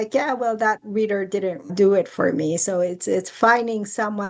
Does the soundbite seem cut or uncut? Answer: cut